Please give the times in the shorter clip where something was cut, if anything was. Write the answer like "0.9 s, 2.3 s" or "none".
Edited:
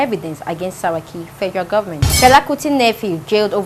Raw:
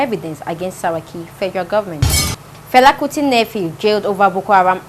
2.1 s